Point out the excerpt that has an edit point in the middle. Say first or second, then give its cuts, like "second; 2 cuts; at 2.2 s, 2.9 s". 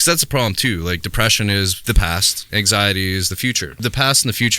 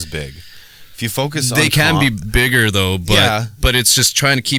first; 2 cuts; at 2.2 s, 3.7 s